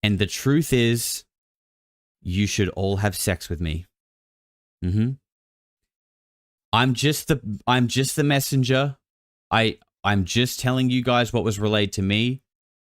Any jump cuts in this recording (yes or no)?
no